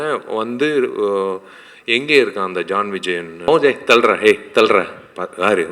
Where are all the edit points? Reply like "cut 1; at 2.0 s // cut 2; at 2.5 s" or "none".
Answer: cut 1; at 3.5 s